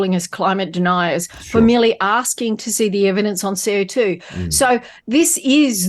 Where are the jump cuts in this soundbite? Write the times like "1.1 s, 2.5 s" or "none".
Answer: none